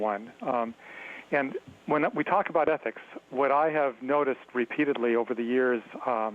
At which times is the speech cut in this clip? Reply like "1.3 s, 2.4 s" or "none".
1.7 s